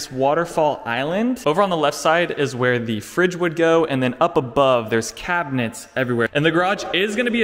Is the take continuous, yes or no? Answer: no